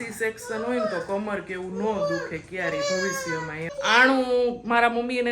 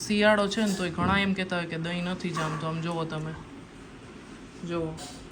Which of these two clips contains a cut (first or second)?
first